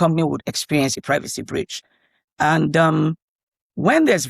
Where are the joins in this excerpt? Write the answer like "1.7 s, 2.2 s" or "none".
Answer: 1.0 s